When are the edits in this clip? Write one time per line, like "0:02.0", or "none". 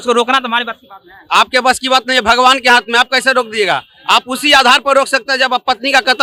none